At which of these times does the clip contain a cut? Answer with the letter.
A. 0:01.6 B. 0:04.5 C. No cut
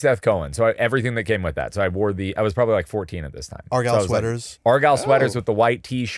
B